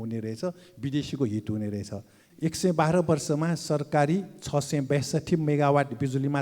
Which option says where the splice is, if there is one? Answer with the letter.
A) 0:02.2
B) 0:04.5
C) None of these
A